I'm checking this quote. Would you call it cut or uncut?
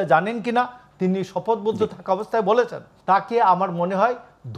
cut